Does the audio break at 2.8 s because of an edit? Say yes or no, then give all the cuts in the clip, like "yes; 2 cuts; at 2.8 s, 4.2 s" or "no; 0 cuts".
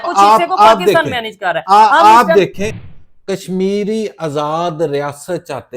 yes; 1 cut; at 2.8 s